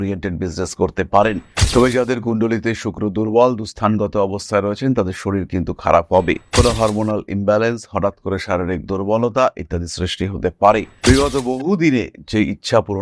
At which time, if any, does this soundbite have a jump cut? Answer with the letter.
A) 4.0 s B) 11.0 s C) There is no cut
B